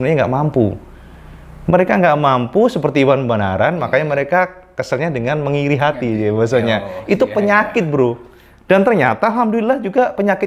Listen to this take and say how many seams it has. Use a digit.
0